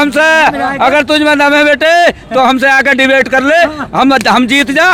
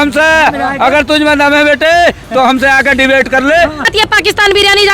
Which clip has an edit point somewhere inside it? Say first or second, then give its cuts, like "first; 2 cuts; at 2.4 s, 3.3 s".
second; 1 cut; at 3.9 s